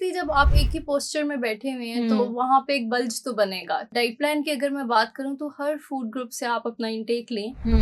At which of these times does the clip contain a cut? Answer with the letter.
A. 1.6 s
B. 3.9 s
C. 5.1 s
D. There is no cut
B